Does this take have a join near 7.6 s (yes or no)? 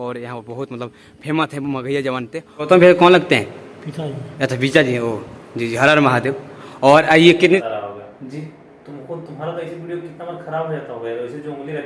yes